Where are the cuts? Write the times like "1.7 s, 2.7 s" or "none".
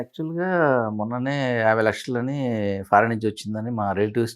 none